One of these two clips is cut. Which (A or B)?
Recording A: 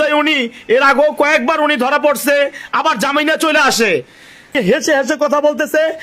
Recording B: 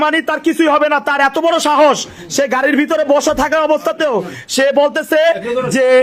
A